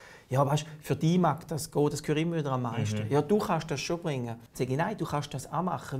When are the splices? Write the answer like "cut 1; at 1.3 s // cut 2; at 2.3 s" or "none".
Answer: cut 1; at 4.4 s